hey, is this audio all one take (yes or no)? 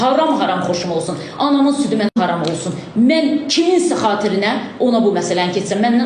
no